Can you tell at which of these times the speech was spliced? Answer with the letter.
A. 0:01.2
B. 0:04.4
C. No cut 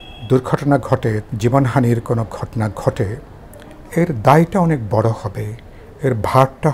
A